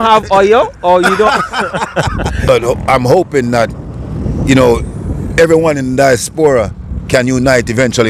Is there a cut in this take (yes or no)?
yes